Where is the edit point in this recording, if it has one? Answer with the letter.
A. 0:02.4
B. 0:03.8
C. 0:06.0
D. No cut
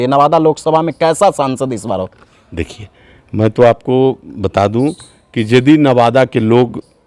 D